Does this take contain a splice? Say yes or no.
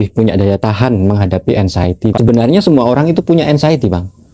yes